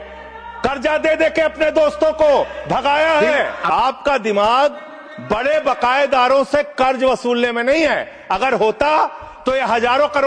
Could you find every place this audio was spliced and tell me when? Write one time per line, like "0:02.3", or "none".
none